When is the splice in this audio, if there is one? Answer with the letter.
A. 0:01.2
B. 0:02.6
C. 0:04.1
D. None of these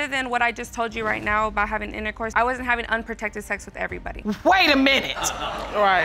C